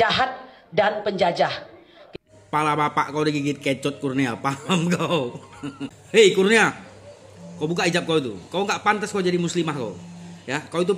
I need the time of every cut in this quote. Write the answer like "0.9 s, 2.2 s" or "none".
5.9 s